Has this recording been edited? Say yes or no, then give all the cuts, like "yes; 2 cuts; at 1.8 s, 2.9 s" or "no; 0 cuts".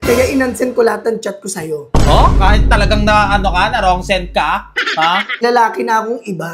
yes; 1 cut; at 5.4 s